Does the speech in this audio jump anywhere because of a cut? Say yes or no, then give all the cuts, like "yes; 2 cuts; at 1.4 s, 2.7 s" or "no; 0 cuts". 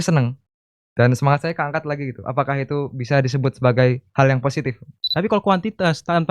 yes; 1 cut; at 5.1 s